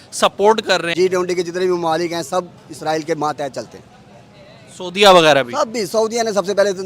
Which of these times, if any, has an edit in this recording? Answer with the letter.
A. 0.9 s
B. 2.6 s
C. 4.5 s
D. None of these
A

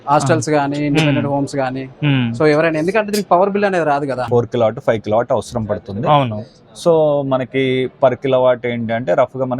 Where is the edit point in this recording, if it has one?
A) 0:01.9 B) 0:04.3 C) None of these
B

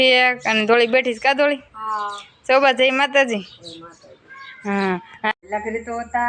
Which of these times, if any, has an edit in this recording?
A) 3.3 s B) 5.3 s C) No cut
B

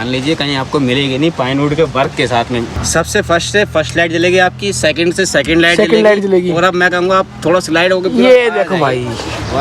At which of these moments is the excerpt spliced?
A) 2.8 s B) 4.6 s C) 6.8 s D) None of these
A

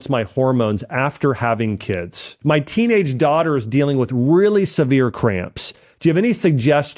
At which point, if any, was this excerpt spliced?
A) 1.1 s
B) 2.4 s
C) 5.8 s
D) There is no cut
B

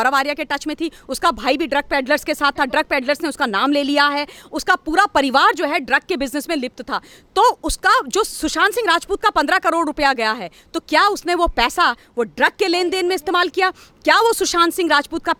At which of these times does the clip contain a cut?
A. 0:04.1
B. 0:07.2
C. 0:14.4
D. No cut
D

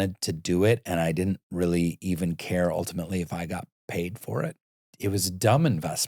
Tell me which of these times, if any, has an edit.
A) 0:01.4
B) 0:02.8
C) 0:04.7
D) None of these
C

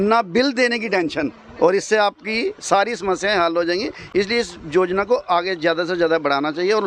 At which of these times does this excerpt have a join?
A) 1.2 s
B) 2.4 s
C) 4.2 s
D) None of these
D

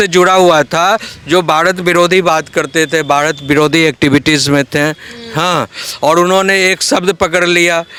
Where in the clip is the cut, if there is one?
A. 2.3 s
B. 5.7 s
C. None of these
C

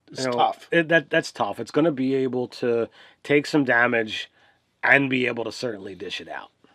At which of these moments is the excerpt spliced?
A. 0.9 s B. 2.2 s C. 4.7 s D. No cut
C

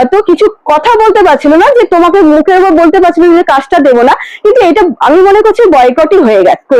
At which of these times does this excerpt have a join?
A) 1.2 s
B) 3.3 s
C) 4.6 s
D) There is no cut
D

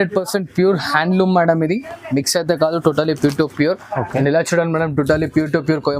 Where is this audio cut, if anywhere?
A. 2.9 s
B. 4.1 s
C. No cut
B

